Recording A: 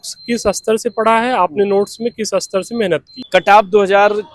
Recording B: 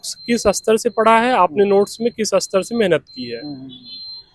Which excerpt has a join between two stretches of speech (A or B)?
A